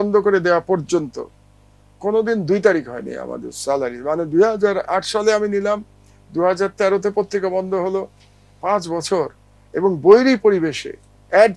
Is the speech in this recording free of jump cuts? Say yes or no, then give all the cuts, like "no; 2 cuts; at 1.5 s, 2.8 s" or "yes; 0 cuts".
yes; 0 cuts